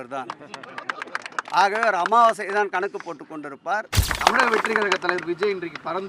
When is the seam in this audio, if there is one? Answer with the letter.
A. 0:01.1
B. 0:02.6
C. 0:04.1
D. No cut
C